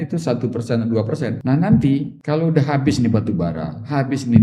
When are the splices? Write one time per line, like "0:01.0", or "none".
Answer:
0:01.4
0:02.1